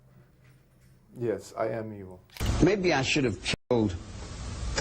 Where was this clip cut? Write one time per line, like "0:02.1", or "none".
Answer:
0:02.4